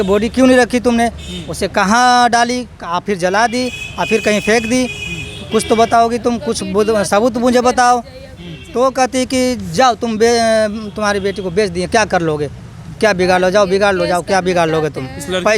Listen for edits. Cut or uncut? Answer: uncut